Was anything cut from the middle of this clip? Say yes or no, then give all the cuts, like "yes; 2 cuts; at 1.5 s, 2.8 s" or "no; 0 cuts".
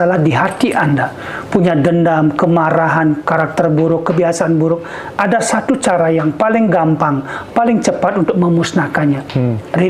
no; 0 cuts